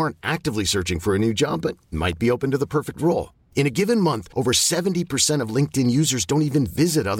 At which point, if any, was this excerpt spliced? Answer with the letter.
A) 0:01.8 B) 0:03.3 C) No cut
C